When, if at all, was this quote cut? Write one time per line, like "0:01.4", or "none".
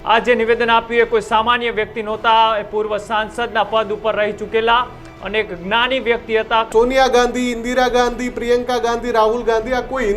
0:06.7